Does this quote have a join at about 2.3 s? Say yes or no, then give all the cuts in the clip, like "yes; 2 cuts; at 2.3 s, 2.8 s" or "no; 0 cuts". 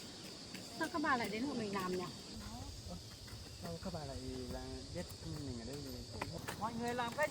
yes; 2 cuts; at 2.3 s, 6.4 s